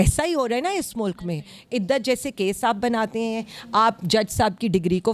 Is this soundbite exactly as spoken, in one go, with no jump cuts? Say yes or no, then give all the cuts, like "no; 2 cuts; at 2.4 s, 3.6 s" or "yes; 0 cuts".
yes; 0 cuts